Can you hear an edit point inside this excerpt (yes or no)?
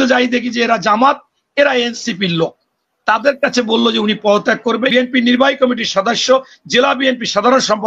yes